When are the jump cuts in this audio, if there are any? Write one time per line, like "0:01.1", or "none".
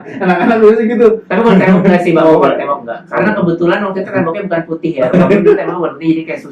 none